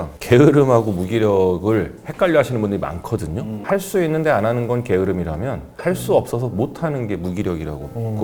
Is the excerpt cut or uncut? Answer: uncut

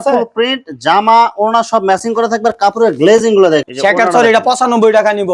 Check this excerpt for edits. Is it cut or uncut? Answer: cut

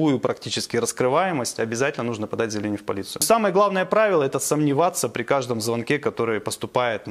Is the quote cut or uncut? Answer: cut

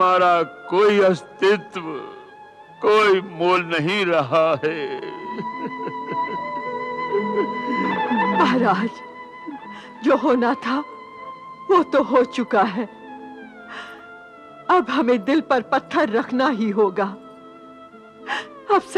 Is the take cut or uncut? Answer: uncut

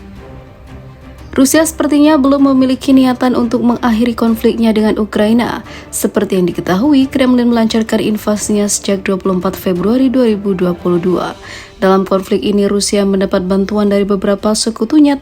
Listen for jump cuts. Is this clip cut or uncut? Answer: cut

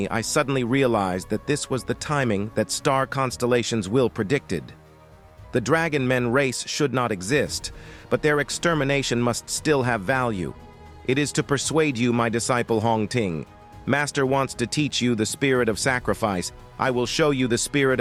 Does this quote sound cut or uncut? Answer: uncut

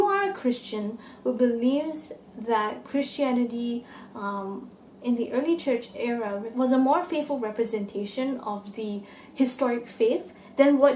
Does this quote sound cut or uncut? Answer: cut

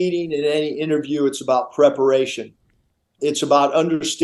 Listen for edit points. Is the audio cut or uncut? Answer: uncut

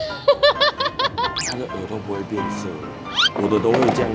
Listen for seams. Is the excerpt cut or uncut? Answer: cut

